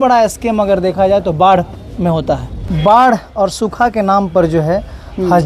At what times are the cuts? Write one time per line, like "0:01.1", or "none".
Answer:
0:02.5

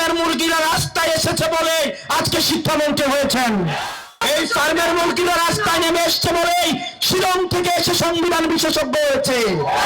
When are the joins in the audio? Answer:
0:04.1

